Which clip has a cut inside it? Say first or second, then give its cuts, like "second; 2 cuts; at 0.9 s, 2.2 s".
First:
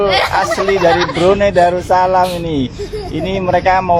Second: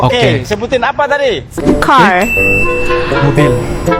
second; 1 cut; at 1.6 s